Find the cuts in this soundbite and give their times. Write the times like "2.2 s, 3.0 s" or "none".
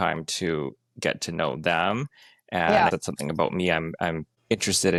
none